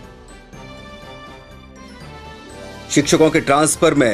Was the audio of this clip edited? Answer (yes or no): yes